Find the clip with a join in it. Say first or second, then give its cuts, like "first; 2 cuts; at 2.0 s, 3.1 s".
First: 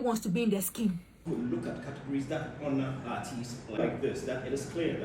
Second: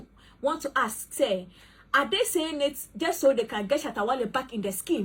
first; 2 cuts; at 1.2 s, 3.8 s